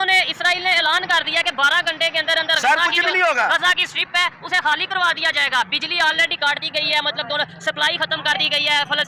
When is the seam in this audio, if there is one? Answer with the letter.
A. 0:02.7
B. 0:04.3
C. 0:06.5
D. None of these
D